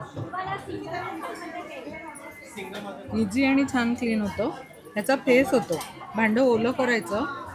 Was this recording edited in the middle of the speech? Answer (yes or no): no